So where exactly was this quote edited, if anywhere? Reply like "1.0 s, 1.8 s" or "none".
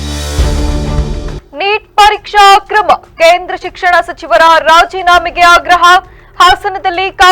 1.3 s